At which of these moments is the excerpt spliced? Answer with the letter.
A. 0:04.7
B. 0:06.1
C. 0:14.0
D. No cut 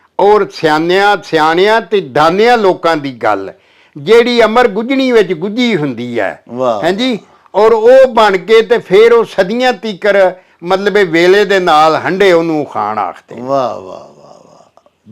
D